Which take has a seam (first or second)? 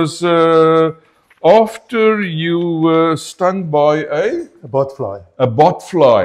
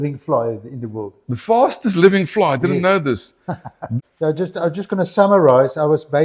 second